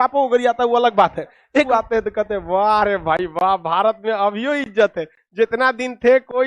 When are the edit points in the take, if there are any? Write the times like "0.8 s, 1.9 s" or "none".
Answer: 1.7 s